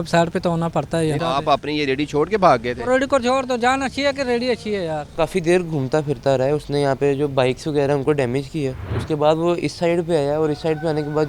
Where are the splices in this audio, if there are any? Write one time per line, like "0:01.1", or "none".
0:01.2
0:05.1
0:08.9